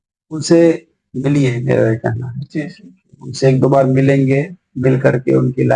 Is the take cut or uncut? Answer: uncut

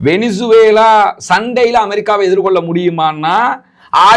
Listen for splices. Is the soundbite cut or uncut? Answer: uncut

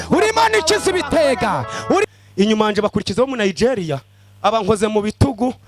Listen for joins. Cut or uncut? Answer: cut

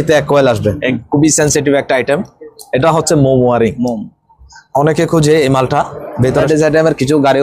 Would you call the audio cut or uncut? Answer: cut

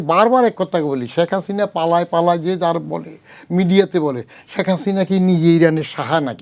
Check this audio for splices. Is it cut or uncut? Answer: uncut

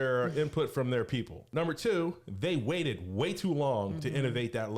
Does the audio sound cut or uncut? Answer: cut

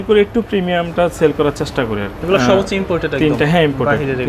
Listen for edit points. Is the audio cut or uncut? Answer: cut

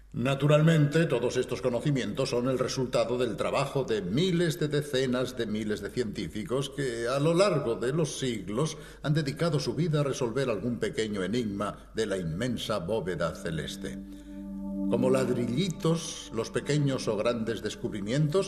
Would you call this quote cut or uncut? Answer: cut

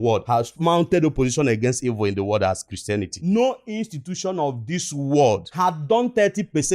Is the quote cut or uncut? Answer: cut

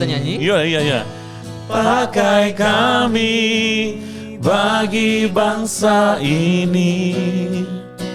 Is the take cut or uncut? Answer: uncut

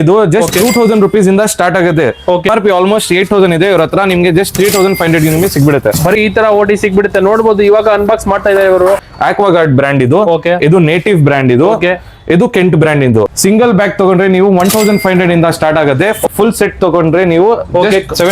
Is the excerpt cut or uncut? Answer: cut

